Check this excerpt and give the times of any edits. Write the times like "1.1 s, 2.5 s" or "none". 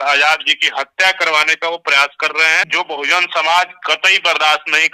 2.7 s